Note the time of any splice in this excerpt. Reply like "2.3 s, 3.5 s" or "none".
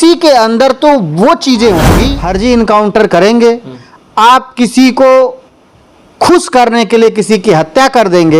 2.2 s